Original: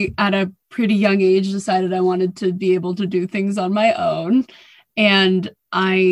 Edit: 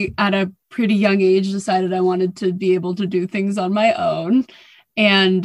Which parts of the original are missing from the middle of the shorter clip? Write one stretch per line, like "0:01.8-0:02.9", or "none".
none